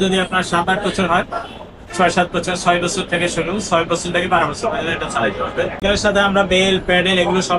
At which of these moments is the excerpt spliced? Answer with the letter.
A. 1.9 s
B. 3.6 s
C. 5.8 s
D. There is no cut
C